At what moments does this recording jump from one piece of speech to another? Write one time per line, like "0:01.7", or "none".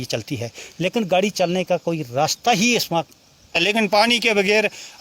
0:03.6